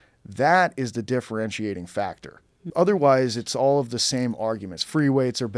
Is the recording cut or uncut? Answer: cut